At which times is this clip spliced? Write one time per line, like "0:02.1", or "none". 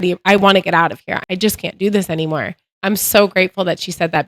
0:01.1
0:02.7